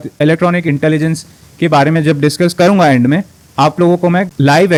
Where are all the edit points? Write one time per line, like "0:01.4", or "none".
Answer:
none